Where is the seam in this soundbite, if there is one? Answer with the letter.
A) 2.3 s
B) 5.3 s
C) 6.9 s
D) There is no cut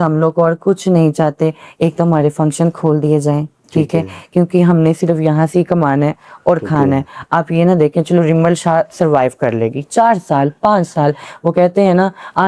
D